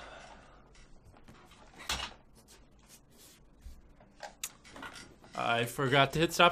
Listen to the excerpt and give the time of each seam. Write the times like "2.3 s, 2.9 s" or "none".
3.4 s